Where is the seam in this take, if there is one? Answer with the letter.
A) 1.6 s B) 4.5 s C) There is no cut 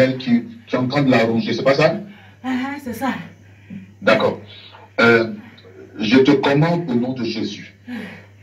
C